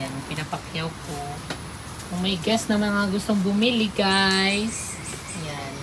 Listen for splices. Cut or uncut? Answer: uncut